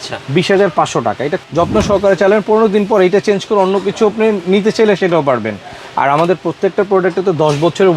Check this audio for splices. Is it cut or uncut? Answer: cut